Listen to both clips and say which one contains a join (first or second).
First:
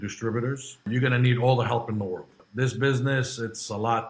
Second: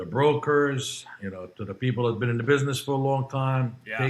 first